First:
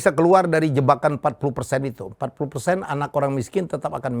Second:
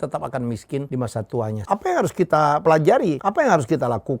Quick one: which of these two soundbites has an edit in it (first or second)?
second